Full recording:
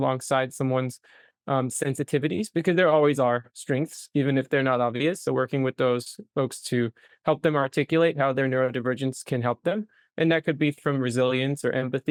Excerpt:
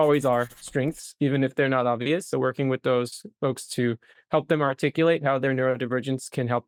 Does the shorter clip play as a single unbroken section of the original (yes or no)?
yes